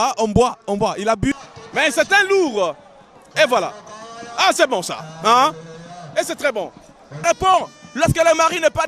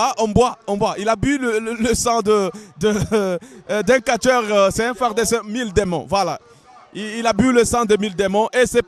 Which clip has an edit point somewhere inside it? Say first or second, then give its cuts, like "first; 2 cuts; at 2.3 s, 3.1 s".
first; 2 cuts; at 1.4 s, 7.1 s